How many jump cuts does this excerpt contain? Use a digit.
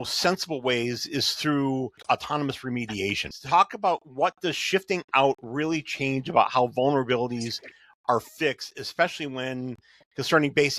2